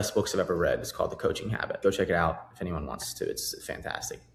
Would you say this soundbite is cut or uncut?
uncut